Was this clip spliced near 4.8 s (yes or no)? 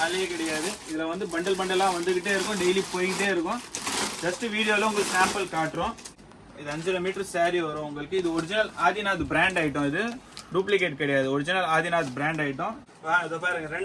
no